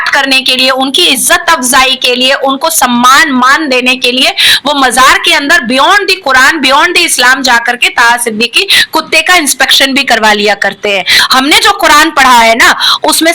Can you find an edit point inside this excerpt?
yes; 1 cut; at 11.1 s

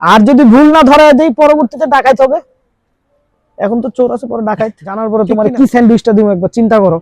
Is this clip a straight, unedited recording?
no; 1 cut; at 5.0 s

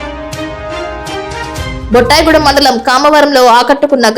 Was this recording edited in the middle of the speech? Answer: yes; 1 cut; at 1.8 s

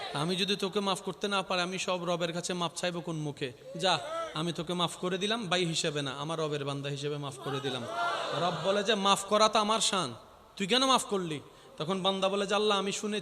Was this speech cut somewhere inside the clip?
no; 0 cuts

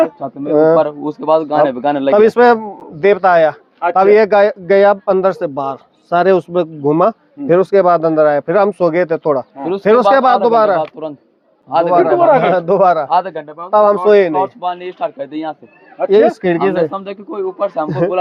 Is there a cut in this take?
no; 0 cuts

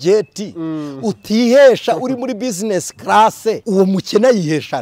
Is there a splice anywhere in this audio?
yes; 1 cut; at 3.6 s

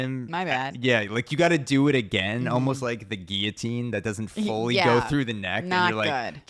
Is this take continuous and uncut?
yes; 0 cuts

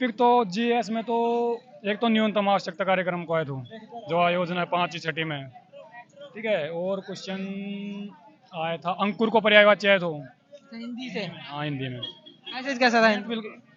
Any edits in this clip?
no; 0 cuts

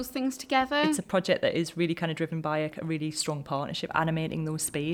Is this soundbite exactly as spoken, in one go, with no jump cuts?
no; 2 cuts; at 1.0 s, 3.9 s

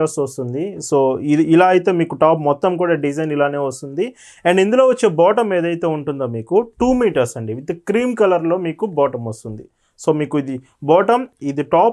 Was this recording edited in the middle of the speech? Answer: no; 0 cuts

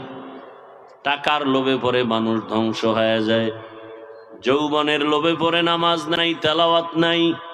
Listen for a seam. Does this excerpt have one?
yes; 1 cut; at 6.2 s

